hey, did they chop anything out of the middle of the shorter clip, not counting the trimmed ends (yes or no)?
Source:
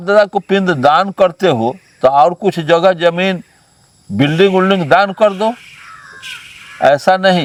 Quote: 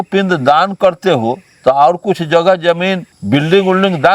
yes